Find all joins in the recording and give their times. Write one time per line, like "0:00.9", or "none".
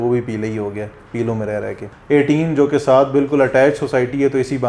0:01.8